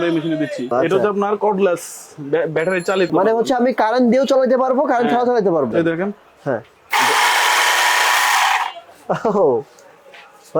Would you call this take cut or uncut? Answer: cut